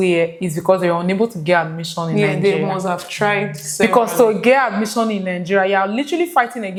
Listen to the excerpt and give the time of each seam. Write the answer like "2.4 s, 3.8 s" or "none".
none